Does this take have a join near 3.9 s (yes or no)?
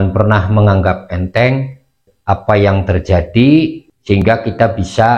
yes